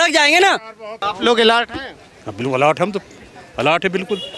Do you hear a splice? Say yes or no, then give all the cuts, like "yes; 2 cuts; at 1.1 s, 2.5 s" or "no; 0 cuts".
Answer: yes; 1 cut; at 1.0 s